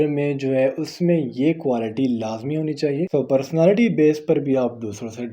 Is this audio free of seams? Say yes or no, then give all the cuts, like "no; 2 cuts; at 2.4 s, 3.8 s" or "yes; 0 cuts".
no; 1 cut; at 3.1 s